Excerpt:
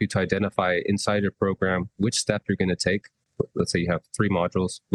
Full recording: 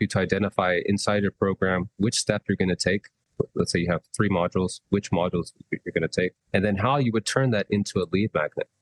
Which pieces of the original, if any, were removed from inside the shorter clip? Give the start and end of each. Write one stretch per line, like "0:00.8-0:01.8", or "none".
none